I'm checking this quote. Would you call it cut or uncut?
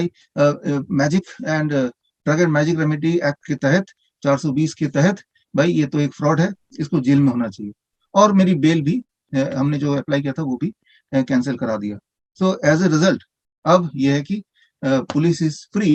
uncut